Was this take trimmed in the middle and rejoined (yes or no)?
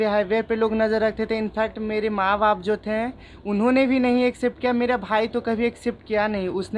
no